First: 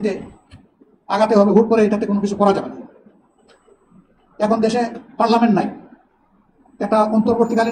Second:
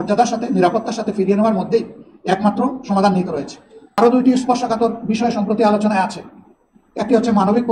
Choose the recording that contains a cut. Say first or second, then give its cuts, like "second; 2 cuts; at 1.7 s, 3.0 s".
second; 1 cut; at 4.0 s